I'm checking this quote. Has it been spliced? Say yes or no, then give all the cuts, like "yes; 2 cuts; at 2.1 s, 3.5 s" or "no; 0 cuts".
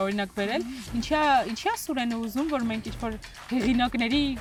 no; 0 cuts